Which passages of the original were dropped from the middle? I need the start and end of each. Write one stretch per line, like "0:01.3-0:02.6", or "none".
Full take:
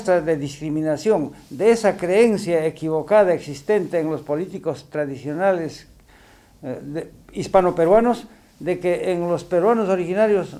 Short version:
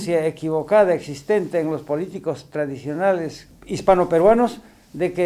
0:05.9-0:07.2